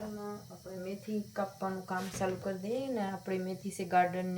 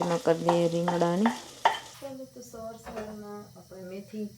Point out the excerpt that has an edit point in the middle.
second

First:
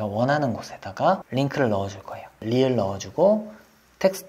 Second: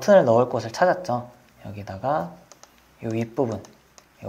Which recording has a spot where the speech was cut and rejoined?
first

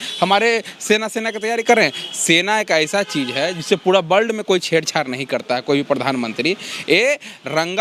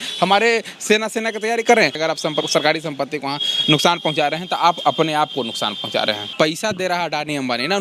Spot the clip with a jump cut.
second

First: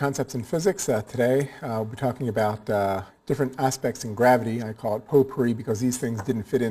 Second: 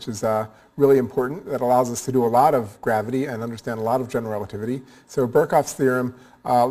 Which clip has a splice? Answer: first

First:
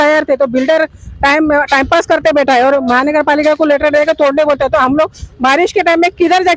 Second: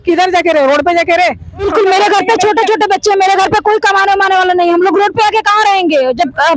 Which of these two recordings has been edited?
second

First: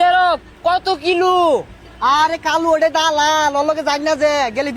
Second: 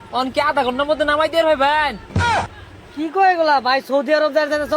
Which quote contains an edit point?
second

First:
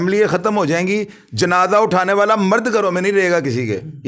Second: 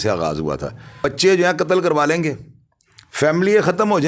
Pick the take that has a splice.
second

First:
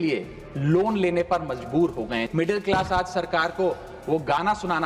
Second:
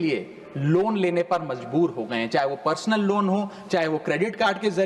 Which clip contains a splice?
first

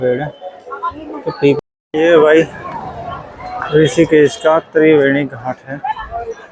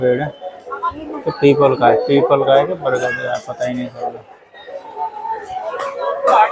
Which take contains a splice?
first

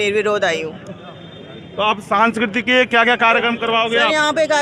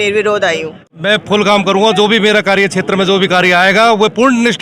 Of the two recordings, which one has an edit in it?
second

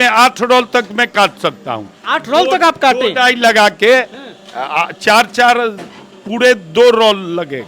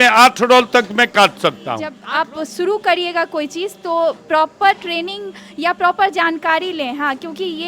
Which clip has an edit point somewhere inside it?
second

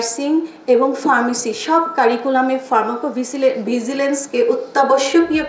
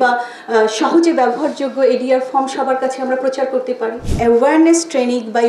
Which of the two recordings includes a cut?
second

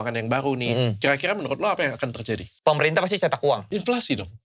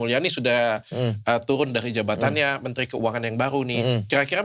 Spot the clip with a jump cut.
first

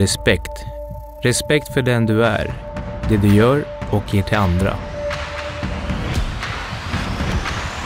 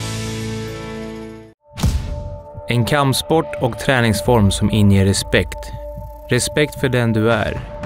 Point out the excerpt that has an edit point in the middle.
second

